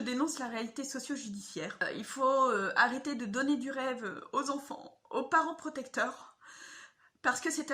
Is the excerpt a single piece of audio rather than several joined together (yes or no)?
no